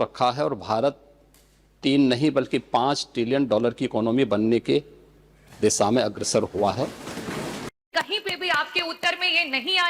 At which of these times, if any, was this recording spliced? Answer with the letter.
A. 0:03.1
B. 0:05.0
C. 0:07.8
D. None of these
C